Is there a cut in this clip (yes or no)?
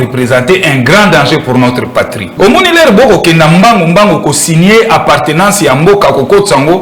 yes